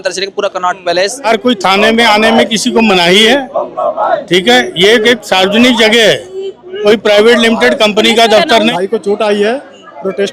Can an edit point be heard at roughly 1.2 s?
yes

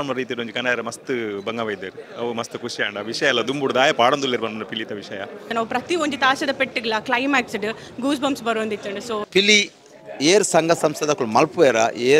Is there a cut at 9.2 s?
yes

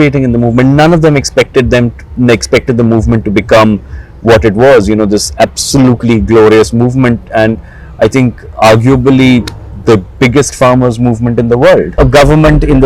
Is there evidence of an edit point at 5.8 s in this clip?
no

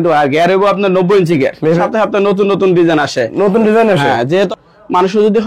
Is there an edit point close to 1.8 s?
yes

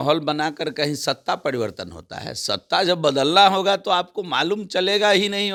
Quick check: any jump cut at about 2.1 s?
no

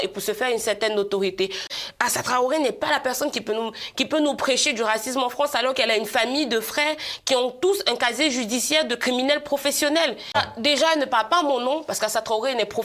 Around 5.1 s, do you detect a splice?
no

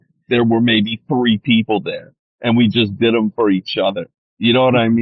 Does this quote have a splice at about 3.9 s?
no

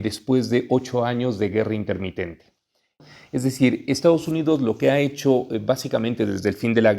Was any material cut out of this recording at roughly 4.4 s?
no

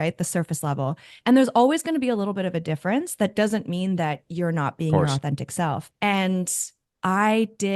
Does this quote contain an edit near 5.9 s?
yes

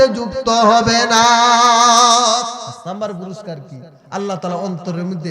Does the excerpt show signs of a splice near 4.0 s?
no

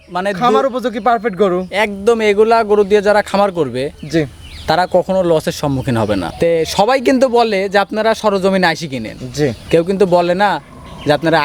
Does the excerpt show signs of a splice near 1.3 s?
no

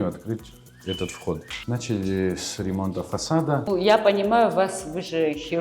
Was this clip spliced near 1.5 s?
yes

